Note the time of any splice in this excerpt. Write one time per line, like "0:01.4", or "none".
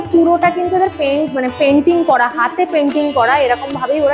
none